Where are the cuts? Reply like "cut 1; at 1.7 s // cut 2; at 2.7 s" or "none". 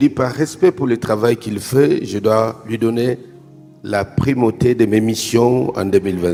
none